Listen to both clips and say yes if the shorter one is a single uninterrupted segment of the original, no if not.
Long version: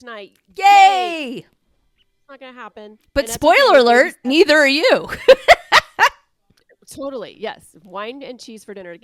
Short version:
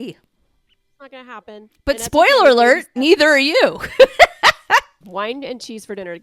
no